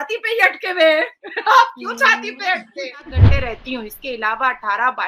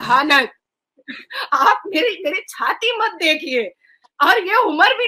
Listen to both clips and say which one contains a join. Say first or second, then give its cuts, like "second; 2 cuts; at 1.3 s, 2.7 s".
first; 1 cut; at 3.2 s